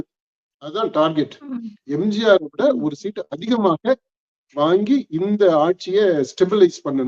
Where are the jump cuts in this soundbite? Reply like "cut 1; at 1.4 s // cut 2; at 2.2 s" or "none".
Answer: none